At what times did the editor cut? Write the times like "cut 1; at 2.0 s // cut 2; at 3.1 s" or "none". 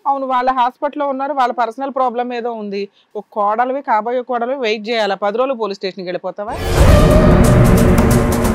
cut 1; at 6.6 s